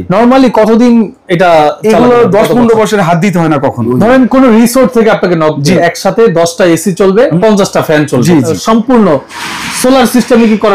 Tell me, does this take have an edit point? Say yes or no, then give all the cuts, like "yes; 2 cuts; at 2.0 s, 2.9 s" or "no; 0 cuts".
yes; 4 cuts; at 3.8 s, 5.8 s, 7.3 s, 8.5 s